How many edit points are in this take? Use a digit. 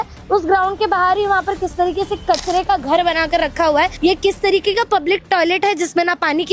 1